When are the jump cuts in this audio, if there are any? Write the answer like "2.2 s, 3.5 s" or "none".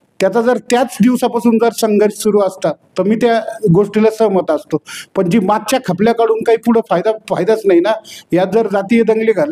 none